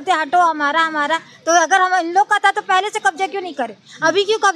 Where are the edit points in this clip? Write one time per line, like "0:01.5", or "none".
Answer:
none